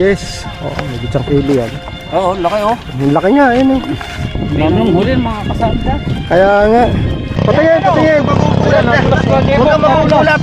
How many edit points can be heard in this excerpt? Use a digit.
1